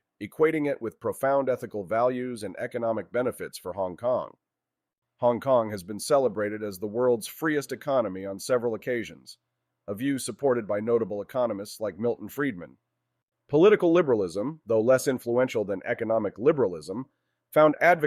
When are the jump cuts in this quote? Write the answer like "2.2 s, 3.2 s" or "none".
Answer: 12.0 s